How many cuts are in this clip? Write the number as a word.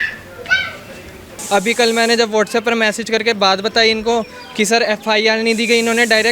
one